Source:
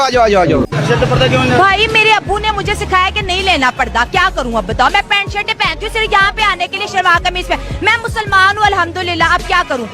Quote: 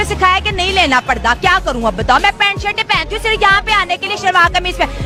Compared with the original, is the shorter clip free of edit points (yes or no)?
yes